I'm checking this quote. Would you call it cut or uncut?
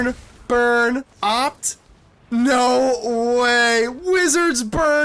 cut